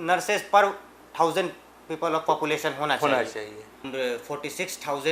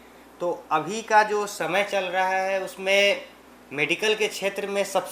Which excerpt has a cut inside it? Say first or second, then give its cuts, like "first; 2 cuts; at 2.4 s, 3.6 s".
first; 1 cut; at 3.9 s